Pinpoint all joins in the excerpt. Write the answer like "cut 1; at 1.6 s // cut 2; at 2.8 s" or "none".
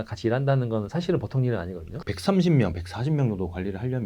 cut 1; at 1.9 s